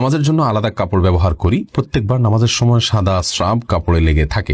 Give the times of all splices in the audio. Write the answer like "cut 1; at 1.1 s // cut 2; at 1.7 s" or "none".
none